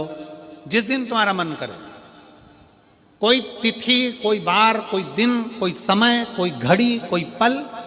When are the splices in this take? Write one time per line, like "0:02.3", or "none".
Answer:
none